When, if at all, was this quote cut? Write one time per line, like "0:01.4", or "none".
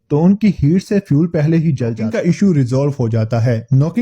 0:02.0